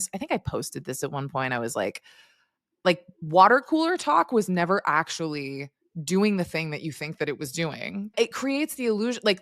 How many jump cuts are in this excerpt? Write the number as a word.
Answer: one